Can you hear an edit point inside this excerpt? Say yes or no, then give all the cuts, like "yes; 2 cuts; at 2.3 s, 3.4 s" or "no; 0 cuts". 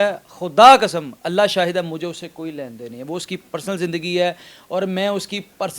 no; 0 cuts